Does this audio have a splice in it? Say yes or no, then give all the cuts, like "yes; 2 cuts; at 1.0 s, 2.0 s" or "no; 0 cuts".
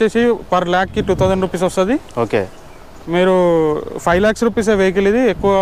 no; 0 cuts